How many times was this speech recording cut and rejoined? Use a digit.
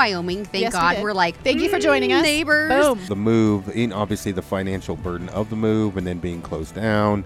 1